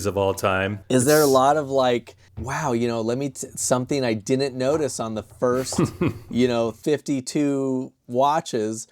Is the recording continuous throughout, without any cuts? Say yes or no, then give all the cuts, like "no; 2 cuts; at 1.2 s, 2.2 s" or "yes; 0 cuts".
yes; 0 cuts